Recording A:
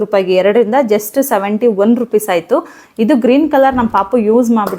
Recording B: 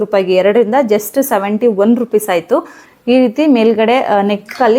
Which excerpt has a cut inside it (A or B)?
B